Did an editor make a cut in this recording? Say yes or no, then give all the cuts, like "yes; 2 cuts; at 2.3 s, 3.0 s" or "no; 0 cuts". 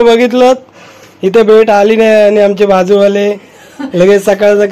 no; 0 cuts